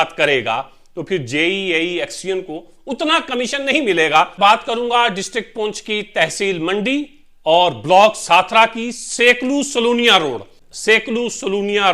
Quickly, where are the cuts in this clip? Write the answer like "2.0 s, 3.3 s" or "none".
4.3 s, 10.6 s